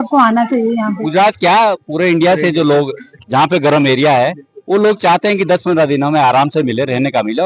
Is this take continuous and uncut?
no; 1 cut; at 1.0 s

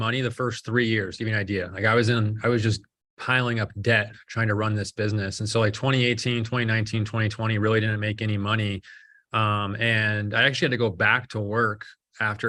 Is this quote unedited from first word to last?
yes; 0 cuts

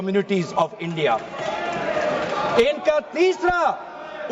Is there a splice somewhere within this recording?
no; 0 cuts

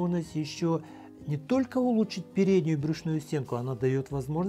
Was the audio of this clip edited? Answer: no; 0 cuts

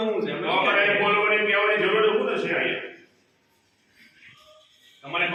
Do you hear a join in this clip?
no; 0 cuts

